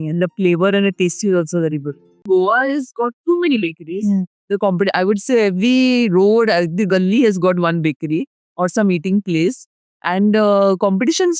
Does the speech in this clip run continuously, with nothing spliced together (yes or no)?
no